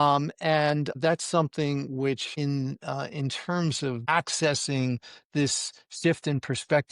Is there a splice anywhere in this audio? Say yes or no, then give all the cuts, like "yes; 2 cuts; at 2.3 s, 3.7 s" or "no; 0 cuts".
yes; 3 cuts; at 1.0 s, 2.3 s, 4.0 s